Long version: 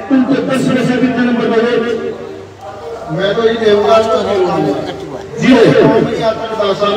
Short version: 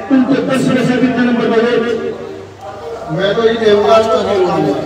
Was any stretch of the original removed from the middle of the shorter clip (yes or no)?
no